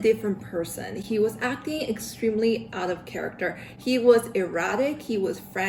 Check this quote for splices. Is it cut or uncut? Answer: uncut